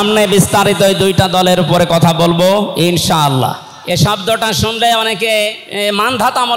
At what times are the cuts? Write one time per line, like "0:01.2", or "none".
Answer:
0:03.7
0:05.6

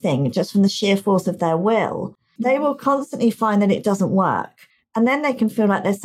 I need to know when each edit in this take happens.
0:02.3

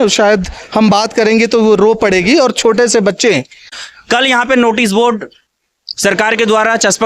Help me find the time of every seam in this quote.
0:03.7

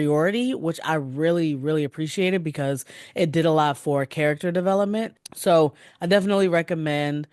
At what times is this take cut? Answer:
0:05.2

